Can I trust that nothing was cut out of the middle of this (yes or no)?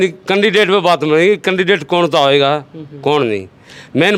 yes